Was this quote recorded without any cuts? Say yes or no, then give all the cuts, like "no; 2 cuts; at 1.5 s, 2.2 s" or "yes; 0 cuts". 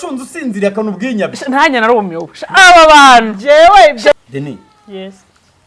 no; 1 cut; at 4.1 s